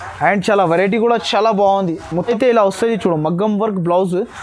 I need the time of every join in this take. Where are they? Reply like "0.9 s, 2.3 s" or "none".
2.3 s